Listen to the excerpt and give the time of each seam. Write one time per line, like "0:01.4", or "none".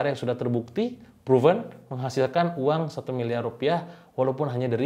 none